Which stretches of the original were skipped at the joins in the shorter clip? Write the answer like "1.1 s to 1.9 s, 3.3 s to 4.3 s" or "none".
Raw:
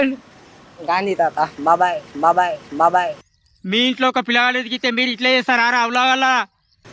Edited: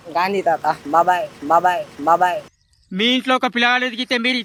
none